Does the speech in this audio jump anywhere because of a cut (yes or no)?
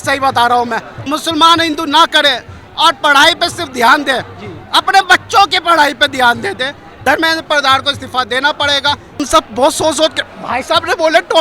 yes